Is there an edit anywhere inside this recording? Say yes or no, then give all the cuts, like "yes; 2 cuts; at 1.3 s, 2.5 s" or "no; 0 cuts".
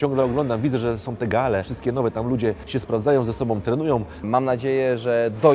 yes; 3 cuts; at 1.7 s, 2.6 s, 4.2 s